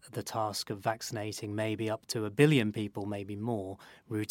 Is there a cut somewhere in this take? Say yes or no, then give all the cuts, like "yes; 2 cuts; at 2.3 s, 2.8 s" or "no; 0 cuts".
no; 0 cuts